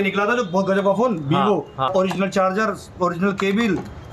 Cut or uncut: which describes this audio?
cut